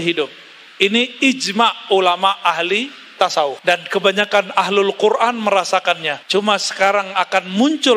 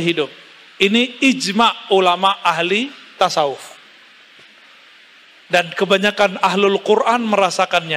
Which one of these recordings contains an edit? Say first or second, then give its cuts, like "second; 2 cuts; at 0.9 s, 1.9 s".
first; 2 cuts; at 3.6 s, 6.1 s